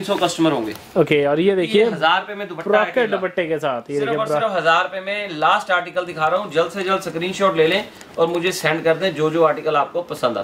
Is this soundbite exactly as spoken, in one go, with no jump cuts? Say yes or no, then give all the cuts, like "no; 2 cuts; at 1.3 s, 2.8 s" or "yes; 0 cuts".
yes; 0 cuts